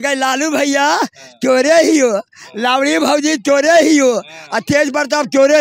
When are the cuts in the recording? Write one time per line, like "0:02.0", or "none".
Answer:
none